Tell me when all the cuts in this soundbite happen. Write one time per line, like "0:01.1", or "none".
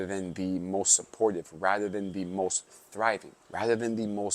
0:03.4

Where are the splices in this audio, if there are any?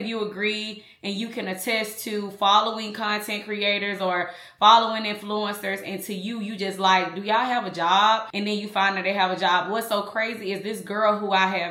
none

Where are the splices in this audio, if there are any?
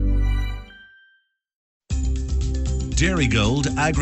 0:01.8

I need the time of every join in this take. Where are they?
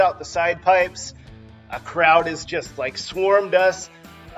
0:01.0

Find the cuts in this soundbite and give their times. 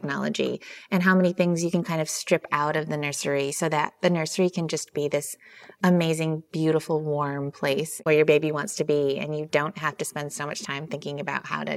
0:08.0

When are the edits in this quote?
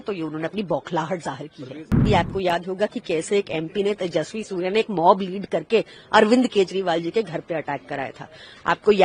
0:02.0

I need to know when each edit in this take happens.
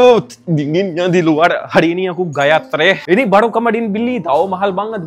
0:03.0

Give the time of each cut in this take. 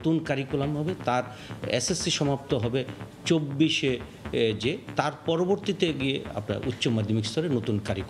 none

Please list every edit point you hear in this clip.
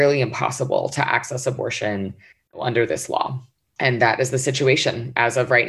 none

